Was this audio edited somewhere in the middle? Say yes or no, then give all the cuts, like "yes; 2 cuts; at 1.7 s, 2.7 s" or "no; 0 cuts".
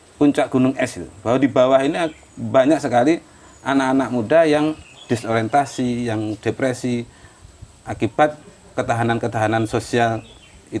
no; 0 cuts